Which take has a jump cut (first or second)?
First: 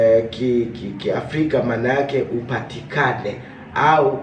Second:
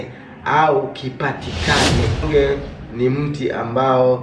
second